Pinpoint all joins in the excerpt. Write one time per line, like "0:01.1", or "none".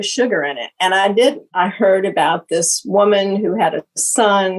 0:01.5